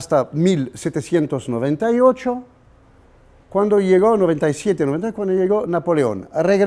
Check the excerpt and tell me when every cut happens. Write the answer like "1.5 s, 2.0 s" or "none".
4.4 s